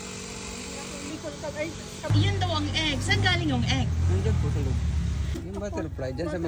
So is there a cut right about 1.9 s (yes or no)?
no